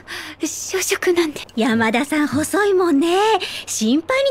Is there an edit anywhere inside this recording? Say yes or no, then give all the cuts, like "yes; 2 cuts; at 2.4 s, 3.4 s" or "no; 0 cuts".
yes; 1 cut; at 1.4 s